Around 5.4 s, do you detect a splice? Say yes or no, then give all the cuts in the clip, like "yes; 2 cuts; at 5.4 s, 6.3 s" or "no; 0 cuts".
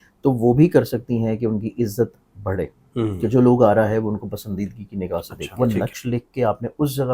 yes; 1 cut; at 5.4 s